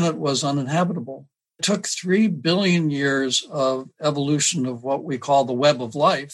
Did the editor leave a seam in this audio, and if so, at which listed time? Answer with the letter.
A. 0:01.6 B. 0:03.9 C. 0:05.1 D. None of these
A